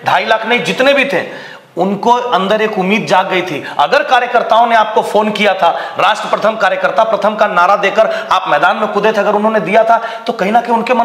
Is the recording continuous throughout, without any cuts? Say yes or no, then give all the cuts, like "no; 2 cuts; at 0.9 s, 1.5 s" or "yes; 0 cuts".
yes; 0 cuts